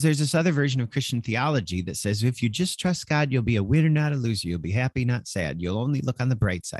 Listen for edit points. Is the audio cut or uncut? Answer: uncut